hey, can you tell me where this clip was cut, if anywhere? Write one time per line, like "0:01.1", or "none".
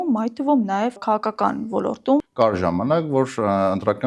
0:01.0
0:02.2